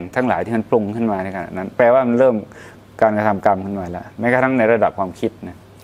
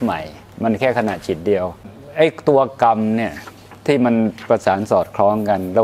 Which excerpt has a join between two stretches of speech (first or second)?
second